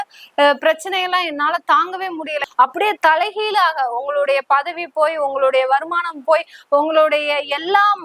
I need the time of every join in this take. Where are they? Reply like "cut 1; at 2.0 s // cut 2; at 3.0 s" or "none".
cut 1; at 2.4 s